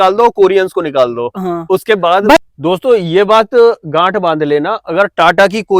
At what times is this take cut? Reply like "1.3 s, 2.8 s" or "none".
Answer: 2.4 s